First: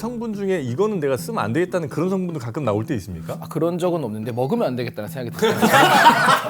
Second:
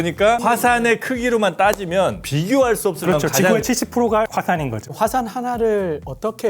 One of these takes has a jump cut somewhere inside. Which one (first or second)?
second